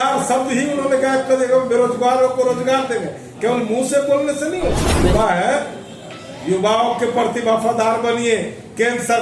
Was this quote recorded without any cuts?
no; 1 cut; at 4.9 s

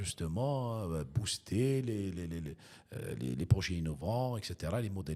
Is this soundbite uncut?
yes; 0 cuts

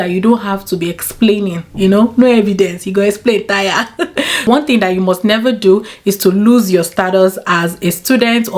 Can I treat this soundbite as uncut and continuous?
no; 1 cut; at 4.2 s

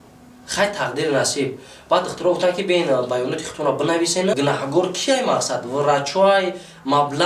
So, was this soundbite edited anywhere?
yes; 1 cut; at 4.3 s

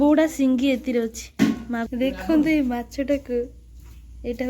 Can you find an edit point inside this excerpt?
yes; 1 cut; at 1.9 s

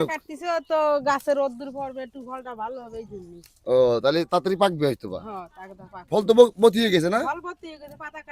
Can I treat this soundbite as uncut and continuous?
yes; 0 cuts

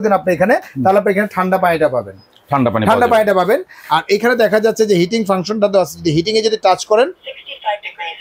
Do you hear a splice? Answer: no; 0 cuts

